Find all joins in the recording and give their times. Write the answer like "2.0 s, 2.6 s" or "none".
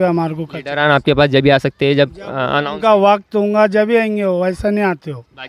none